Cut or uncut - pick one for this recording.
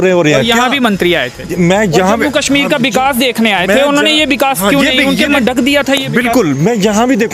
cut